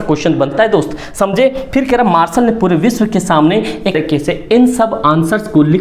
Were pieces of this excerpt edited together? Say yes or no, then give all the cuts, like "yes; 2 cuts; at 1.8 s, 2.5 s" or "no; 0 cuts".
yes; 1 cut; at 4.0 s